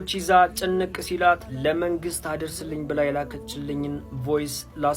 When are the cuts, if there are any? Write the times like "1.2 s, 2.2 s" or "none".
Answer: none